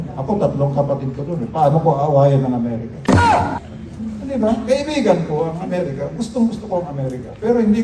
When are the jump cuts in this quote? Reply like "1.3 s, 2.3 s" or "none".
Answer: none